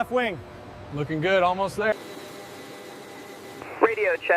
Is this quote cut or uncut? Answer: cut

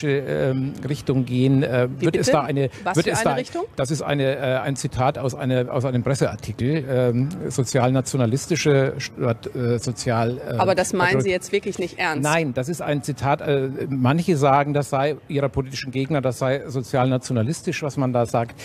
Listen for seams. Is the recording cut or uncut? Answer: cut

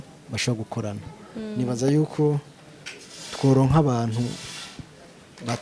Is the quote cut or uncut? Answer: uncut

